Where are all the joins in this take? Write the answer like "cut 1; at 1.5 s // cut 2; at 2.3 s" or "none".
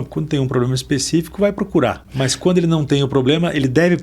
cut 1; at 2.0 s